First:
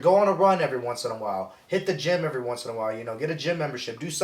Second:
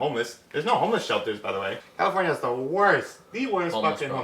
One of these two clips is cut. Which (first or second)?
second